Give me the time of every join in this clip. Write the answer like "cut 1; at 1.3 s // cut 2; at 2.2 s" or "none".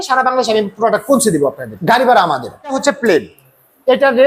cut 1; at 1.7 s // cut 2; at 2.8 s